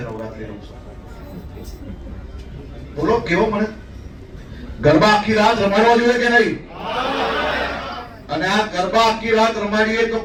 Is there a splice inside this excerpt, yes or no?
no